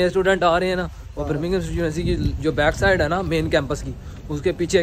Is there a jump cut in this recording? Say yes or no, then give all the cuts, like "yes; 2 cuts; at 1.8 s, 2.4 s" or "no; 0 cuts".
no; 0 cuts